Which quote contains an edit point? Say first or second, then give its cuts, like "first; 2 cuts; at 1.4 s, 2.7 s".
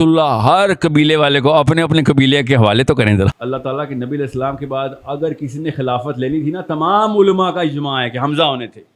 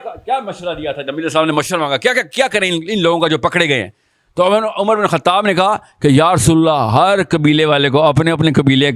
first; 1 cut; at 3.4 s